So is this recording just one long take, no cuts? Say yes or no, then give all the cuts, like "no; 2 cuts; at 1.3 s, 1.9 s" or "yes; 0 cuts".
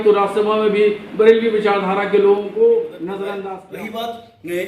no; 1 cut; at 3.5 s